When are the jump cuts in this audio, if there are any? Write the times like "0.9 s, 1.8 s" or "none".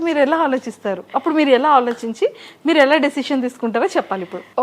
none